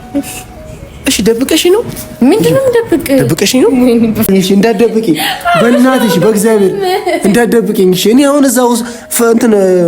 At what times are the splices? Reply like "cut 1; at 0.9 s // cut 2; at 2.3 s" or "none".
cut 1; at 4.3 s